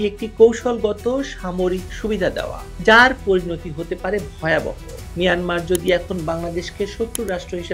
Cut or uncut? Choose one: uncut